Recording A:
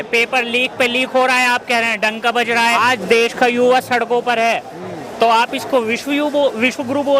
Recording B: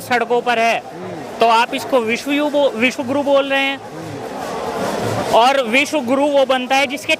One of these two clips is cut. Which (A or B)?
A